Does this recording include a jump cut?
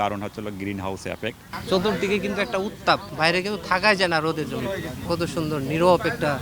yes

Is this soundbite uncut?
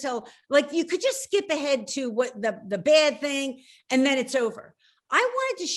yes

